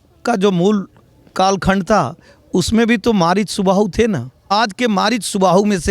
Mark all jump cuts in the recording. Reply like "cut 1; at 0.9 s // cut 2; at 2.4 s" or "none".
cut 1; at 4.3 s